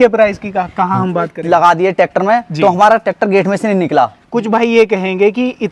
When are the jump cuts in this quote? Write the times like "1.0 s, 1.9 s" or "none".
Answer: 1.4 s, 4.2 s